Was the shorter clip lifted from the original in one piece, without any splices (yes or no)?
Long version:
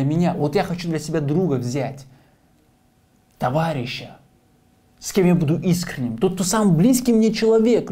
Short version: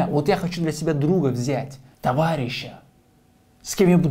no